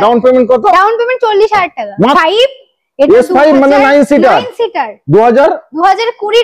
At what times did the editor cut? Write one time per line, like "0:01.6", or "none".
0:02.1